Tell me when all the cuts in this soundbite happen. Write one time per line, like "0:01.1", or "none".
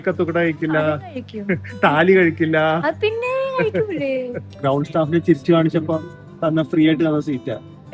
0:04.4